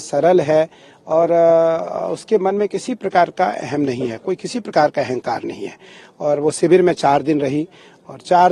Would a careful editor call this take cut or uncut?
uncut